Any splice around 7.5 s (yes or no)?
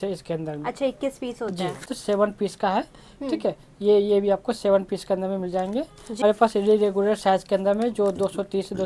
no